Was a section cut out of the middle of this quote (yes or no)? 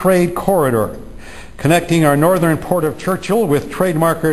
yes